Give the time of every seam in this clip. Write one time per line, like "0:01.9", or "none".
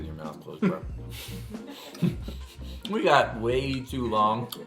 none